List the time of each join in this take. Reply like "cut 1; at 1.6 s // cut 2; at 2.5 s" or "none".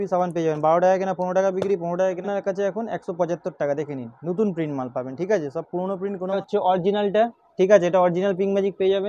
cut 1; at 2.2 s // cut 2; at 6.4 s